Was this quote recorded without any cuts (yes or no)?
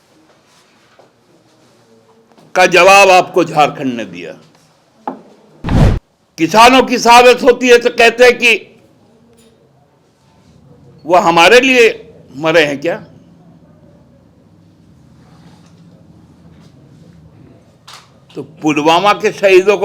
no